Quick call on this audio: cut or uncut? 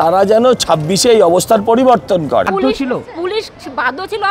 cut